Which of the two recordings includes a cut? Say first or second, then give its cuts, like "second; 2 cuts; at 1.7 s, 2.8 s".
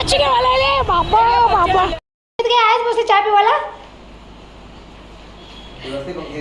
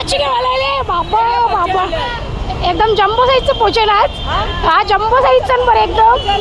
first; 1 cut; at 2.0 s